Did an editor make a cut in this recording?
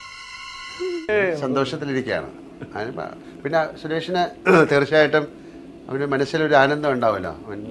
yes; 1 cut; at 1.0 s

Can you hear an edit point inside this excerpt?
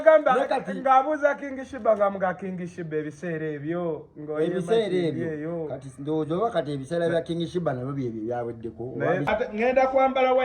yes; 1 cut; at 9.5 s

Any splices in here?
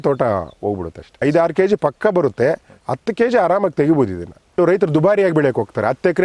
yes; 2 cuts; at 1.2 s, 4.6 s

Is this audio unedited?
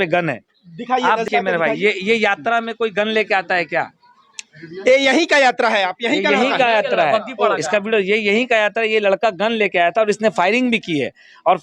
no; 1 cut; at 1.3 s

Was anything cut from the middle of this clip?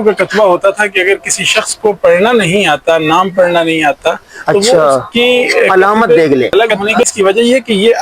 yes; 1 cut; at 6.5 s

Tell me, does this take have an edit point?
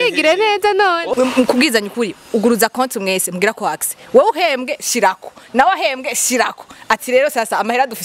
yes; 1 cut; at 1.1 s

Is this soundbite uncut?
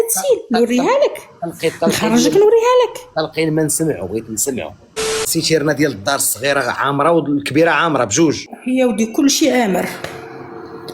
no; 2 cuts; at 5.3 s, 8.5 s

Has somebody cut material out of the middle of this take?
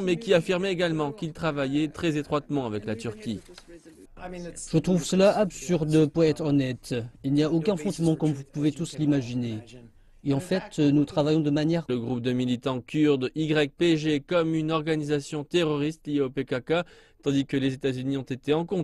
no; 0 cuts

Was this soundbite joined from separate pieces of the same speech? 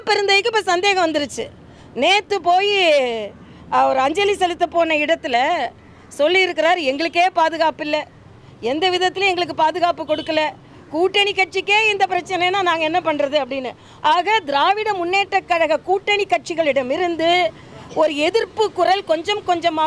no; 0 cuts

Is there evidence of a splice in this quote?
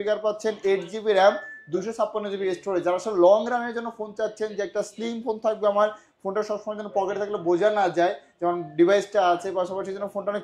no; 0 cuts

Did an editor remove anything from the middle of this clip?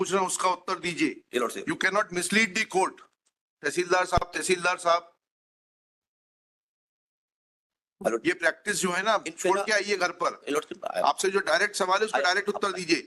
no; 0 cuts

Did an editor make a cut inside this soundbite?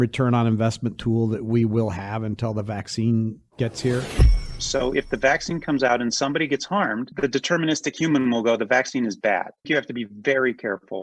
yes; 2 cuts; at 4.5 s, 9.7 s

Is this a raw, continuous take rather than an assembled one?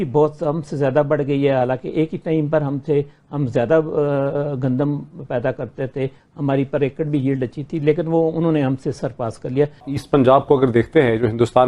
no; 1 cut; at 9.9 s

